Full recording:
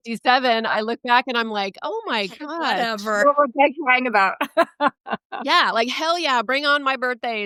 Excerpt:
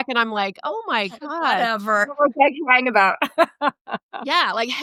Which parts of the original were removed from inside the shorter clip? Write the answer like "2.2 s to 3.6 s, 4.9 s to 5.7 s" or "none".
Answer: none